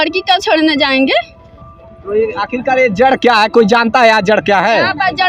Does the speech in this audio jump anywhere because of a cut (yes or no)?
no